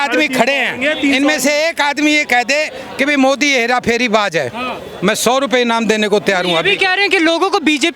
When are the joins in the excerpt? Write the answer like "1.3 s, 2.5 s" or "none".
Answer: none